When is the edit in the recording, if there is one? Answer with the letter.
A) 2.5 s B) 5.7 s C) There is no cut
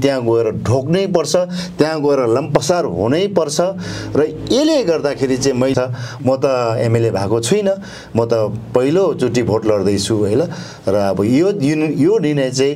B